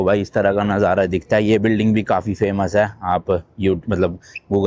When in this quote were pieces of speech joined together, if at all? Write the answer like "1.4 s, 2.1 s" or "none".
none